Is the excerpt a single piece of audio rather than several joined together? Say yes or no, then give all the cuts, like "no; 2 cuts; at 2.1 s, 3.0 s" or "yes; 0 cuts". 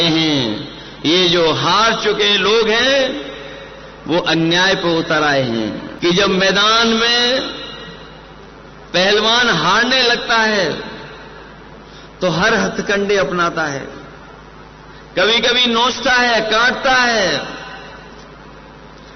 no; 1 cut; at 5.9 s